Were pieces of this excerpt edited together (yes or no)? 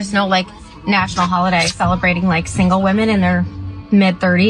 no